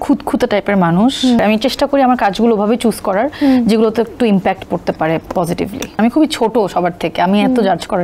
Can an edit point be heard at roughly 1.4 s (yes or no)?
yes